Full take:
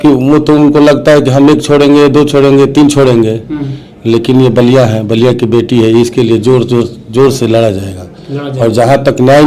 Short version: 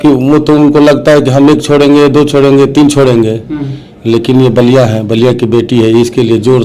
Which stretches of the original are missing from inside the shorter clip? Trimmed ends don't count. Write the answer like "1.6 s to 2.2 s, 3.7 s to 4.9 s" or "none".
none